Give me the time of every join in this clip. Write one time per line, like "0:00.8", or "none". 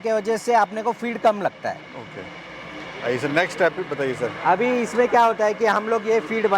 none